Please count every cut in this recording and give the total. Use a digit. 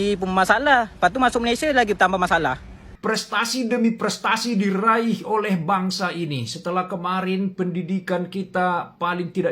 1